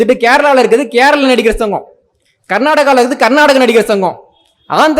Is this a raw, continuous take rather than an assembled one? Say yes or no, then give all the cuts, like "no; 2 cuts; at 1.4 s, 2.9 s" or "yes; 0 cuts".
yes; 0 cuts